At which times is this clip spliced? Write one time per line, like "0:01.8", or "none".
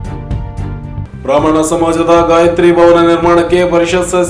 none